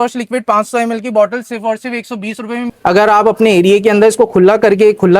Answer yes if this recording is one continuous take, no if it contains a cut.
no